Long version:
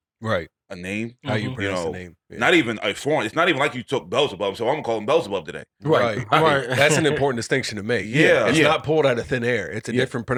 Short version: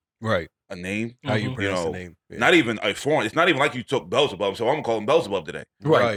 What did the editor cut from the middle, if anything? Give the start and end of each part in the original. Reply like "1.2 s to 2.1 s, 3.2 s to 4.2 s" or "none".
none